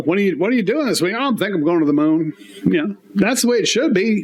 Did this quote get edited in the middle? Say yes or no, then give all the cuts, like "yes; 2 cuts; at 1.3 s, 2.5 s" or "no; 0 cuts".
no; 0 cuts